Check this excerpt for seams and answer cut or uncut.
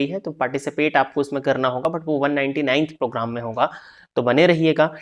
uncut